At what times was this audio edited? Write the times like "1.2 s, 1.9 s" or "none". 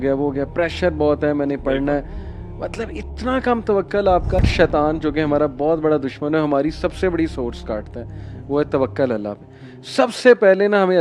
4.5 s